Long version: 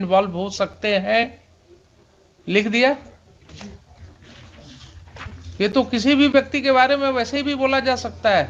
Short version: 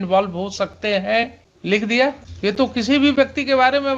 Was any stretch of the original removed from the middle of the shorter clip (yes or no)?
yes